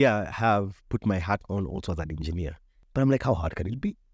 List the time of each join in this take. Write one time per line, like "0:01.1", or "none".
none